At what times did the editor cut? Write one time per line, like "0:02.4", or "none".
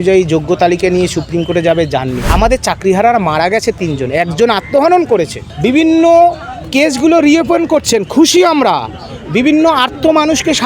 0:02.2
0:05.4